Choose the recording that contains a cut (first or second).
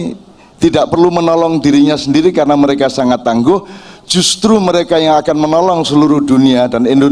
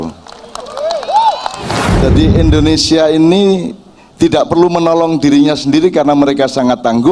second